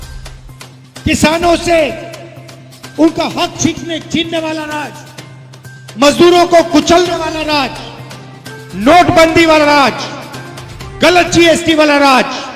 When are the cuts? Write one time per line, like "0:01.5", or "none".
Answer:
0:01.0